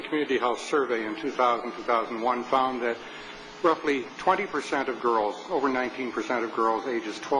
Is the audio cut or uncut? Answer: cut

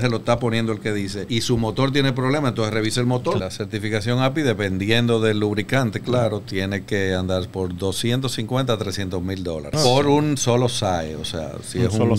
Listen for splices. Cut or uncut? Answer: cut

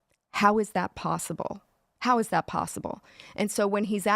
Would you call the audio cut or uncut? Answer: cut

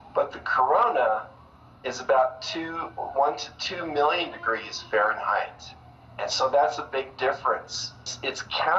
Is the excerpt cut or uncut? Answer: uncut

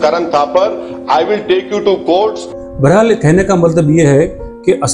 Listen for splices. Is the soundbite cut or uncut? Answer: uncut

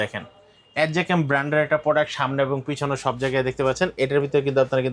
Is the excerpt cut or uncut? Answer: uncut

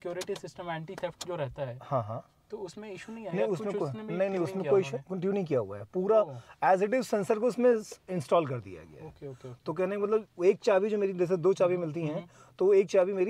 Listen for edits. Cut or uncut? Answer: uncut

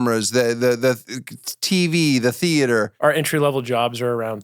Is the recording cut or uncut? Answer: cut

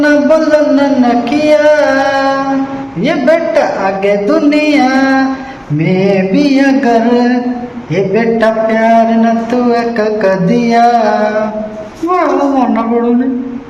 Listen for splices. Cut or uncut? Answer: uncut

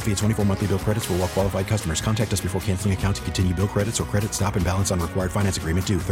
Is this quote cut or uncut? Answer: uncut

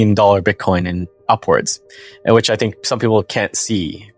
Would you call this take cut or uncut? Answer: uncut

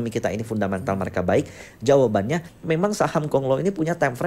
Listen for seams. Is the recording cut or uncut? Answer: cut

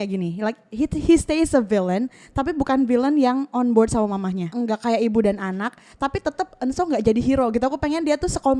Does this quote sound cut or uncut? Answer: cut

